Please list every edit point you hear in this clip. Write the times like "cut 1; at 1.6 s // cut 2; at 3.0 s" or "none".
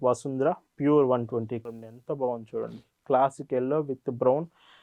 cut 1; at 1.6 s